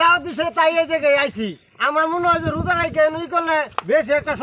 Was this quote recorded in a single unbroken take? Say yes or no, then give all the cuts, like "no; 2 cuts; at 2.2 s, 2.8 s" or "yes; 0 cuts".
yes; 0 cuts